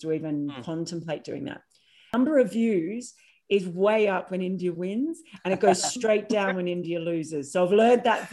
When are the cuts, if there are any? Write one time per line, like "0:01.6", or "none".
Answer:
0:02.1